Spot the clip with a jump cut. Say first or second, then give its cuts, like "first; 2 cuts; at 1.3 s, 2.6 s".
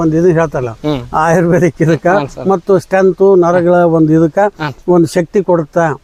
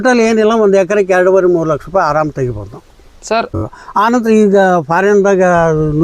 second; 1 cut; at 3.5 s